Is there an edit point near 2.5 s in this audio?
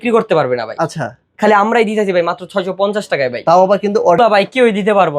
no; 1 cut; at 4.2 s

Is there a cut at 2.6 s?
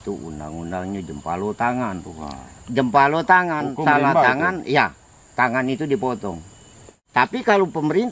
no; 1 cut; at 7.0 s

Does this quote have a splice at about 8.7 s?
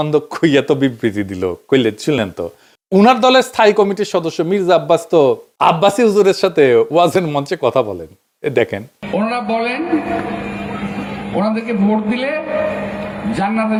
no; 0 cuts

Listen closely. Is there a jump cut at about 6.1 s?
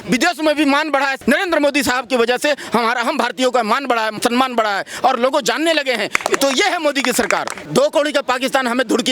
no; 3 cuts; at 1.2 s, 4.1 s, 7.6 s

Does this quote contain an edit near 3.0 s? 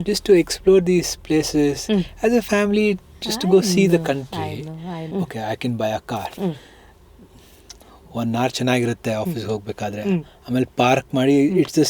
no; 1 cut; at 5.1 s

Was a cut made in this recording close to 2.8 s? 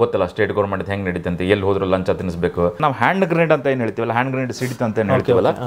yes; 1 cut; at 2.8 s

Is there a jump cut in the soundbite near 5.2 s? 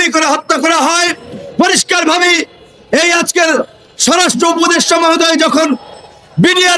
no; 0 cuts

